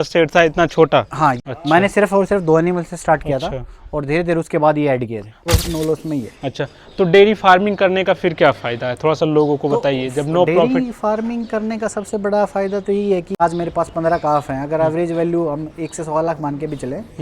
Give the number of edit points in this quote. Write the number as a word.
three